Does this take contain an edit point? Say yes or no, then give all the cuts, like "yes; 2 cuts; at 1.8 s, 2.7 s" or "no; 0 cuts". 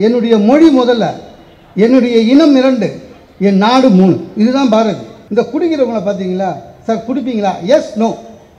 yes; 1 cut; at 5.1 s